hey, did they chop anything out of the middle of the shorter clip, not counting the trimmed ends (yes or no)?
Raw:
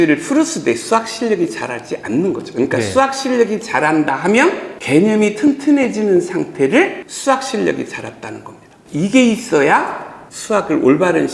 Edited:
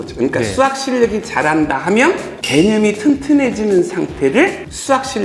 no